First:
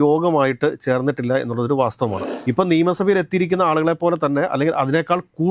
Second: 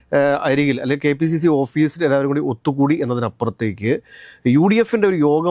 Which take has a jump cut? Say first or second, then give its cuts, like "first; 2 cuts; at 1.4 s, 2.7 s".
first; 1 cut; at 2.2 s